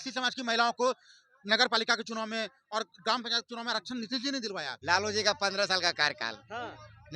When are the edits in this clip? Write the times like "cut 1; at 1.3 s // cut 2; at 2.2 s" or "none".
cut 1; at 4.7 s